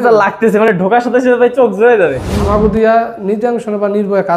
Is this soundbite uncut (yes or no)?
no